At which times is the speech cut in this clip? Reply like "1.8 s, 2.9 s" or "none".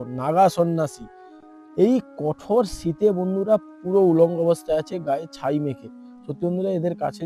none